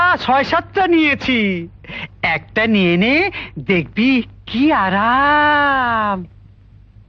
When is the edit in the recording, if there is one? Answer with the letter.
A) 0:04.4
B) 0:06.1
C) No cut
C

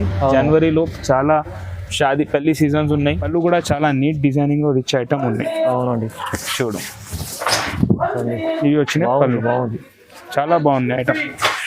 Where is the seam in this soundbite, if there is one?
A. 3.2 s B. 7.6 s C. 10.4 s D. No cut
A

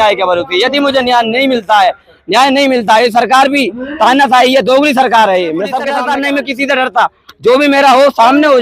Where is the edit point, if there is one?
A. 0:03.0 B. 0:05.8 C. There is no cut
B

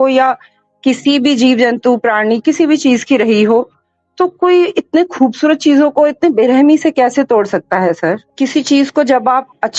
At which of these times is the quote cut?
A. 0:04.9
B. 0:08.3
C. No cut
B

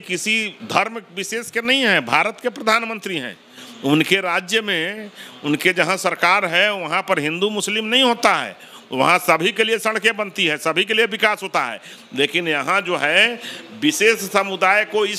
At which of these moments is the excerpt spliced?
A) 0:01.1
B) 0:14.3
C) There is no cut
C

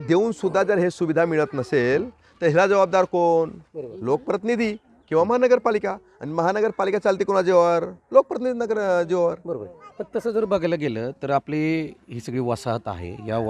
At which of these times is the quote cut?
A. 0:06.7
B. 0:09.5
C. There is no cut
C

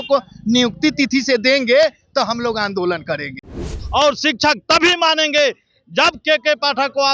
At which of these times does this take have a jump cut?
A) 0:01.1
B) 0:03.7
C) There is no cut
B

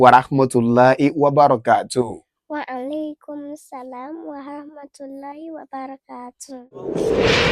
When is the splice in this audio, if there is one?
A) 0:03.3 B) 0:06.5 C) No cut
B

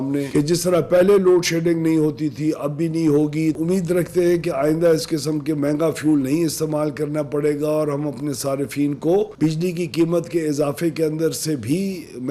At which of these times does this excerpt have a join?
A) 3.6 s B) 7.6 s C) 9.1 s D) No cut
A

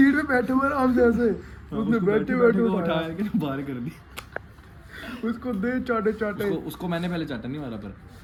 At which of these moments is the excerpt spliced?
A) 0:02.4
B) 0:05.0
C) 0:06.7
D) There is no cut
D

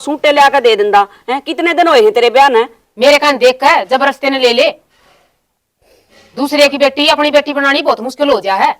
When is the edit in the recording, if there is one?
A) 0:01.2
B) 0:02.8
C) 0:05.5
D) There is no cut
B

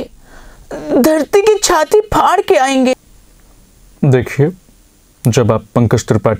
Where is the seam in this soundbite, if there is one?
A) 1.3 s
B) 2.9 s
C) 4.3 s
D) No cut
B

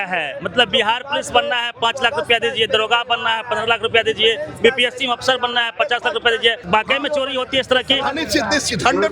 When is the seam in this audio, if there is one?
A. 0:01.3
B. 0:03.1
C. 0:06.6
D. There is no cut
C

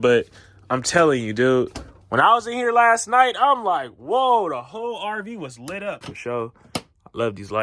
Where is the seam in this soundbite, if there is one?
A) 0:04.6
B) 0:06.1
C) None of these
B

